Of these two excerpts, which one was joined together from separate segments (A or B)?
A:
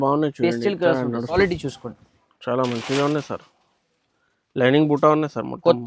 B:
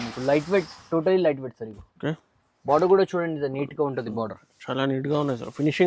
A